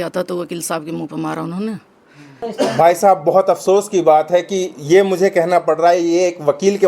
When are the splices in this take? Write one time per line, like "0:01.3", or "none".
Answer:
0:02.5

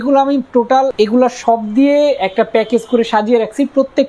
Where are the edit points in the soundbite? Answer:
0:00.9

